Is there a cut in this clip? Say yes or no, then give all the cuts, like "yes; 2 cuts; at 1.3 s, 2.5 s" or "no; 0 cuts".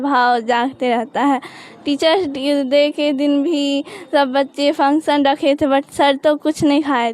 no; 0 cuts